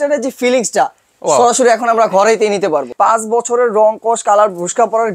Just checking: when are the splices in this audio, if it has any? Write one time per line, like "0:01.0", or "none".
0:02.9